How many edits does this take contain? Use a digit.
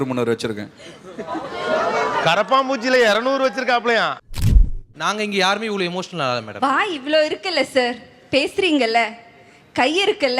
1